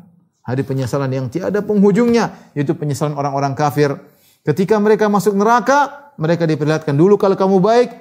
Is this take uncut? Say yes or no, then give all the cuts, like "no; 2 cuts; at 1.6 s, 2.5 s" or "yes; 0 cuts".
yes; 0 cuts